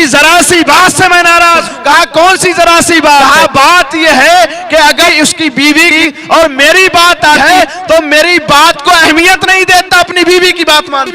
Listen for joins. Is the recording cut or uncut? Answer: cut